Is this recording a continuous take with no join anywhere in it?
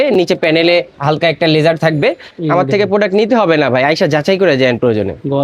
no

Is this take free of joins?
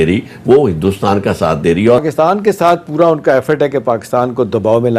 no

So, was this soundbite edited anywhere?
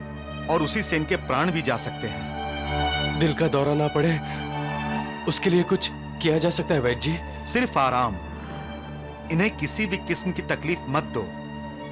no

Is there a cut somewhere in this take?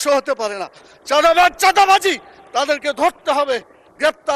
no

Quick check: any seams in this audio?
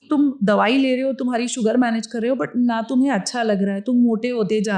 no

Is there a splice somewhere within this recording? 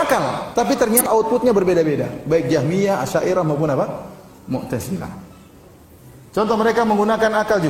yes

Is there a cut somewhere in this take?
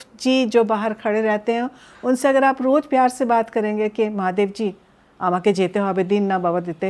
no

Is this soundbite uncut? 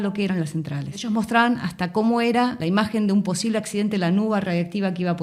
no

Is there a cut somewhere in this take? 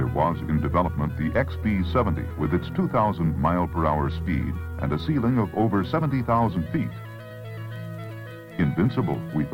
no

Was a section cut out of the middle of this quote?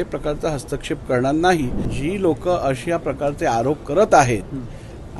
yes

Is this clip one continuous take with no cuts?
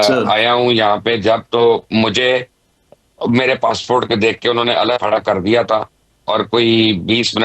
yes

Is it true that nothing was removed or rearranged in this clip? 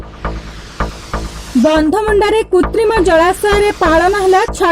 no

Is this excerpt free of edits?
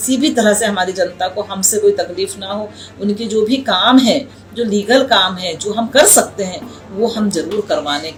yes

